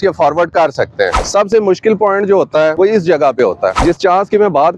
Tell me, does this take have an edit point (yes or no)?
yes